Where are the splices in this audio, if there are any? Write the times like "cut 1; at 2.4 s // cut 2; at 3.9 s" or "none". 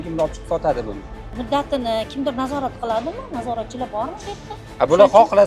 cut 1; at 1.3 s // cut 2; at 4.6 s